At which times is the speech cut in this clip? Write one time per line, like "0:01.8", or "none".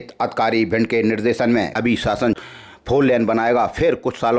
0:01.7